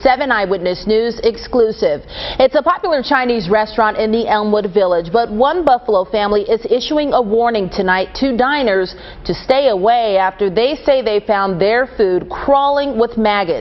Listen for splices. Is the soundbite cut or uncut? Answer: uncut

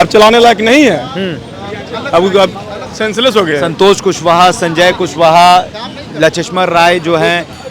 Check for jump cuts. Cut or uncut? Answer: uncut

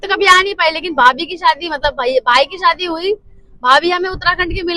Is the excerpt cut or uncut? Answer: uncut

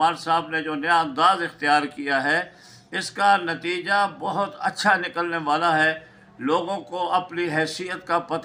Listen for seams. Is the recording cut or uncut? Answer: uncut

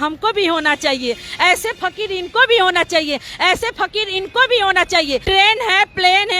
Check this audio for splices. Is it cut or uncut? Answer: cut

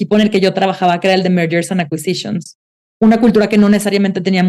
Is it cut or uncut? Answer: cut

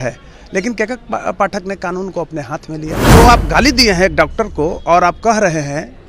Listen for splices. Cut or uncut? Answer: cut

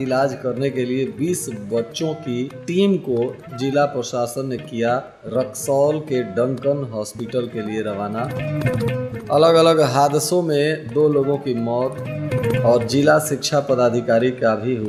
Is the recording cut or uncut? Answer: uncut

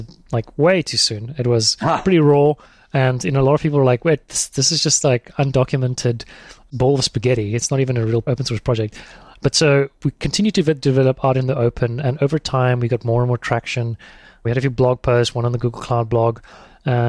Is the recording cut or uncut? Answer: uncut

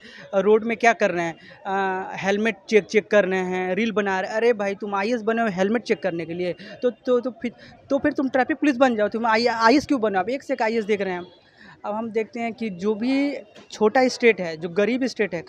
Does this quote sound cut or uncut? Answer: uncut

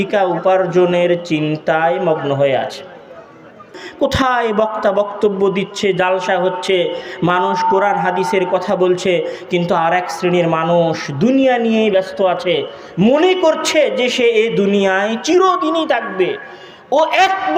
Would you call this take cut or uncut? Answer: cut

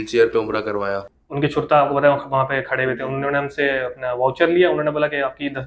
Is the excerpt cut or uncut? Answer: cut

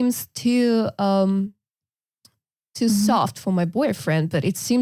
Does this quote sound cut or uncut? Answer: uncut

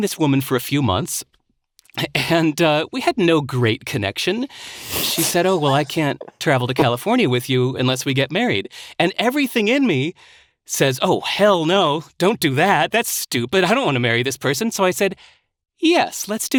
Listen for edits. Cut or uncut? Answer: uncut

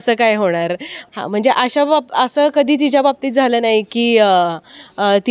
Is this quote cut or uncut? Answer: uncut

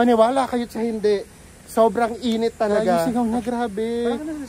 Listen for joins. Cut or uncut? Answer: cut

